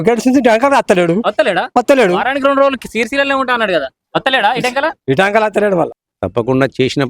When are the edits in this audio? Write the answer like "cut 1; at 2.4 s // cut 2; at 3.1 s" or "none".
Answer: cut 1; at 3.9 s // cut 2; at 6.0 s